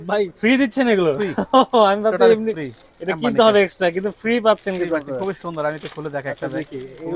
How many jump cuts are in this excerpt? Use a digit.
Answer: 0